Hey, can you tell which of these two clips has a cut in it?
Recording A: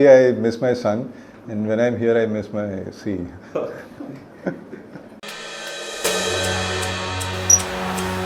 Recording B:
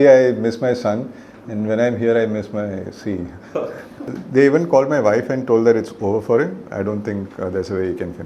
B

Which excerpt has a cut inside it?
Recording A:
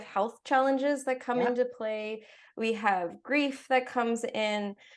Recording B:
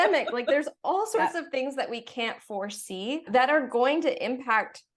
B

